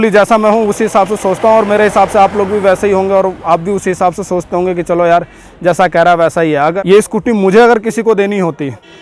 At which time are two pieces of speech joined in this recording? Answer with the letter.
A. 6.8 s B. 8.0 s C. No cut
A